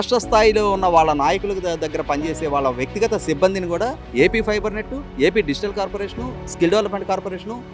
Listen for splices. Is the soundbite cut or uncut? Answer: uncut